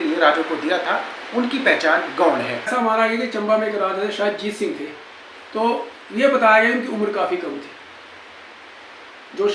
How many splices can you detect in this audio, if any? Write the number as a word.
one